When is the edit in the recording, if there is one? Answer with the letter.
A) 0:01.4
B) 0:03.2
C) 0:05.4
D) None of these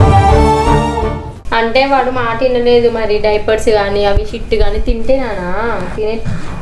D